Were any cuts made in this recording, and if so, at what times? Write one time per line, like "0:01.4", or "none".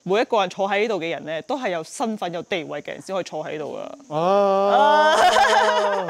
none